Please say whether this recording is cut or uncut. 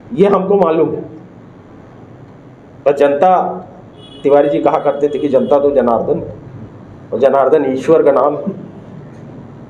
uncut